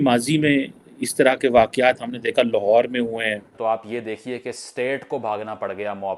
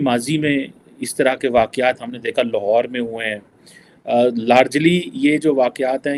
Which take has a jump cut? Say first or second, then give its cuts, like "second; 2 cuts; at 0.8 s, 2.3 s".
first; 1 cut; at 3.5 s